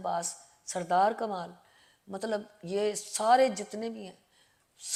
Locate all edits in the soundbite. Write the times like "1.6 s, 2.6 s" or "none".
none